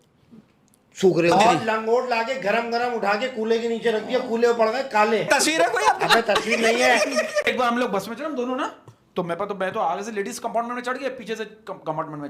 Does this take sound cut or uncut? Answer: cut